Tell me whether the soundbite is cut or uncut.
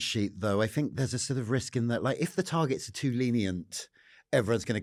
uncut